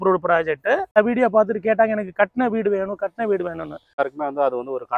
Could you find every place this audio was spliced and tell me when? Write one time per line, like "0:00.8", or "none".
0:01.0
0:04.0

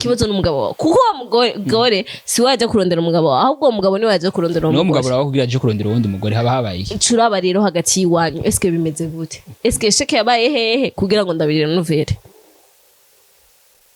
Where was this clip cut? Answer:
none

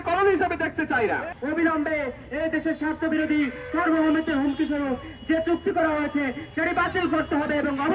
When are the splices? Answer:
0:01.3

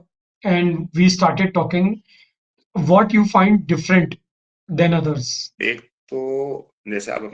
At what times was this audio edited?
0:05.4

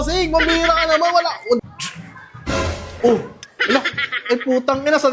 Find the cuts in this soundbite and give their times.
0:01.6

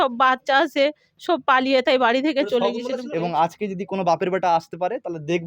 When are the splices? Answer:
0:03.0

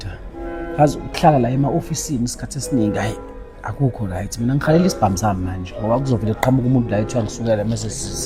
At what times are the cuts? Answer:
none

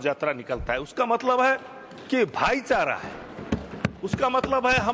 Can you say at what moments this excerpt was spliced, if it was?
none

